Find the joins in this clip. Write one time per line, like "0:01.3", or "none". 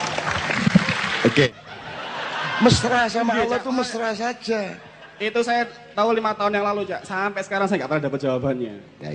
0:01.5